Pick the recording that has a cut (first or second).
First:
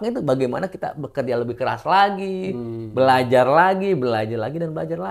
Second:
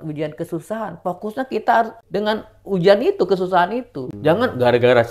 second